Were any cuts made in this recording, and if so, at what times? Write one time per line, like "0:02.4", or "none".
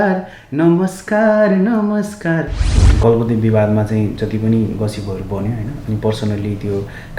0:02.7